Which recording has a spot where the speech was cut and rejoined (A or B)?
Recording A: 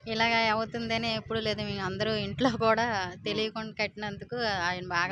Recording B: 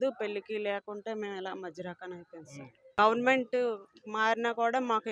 B